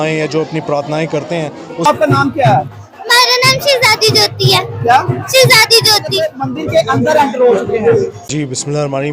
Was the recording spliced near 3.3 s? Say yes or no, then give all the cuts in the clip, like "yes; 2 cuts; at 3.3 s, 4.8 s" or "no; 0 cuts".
no; 3 cuts; at 1.8 s, 5.9 s, 8.2 s